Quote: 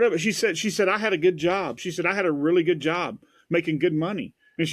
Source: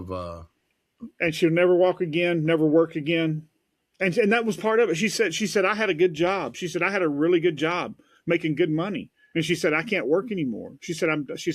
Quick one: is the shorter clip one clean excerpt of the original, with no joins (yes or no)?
yes